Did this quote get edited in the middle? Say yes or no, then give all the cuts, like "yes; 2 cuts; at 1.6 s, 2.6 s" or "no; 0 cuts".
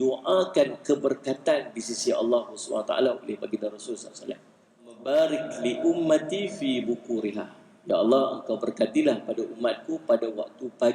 yes; 1 cut; at 5.0 s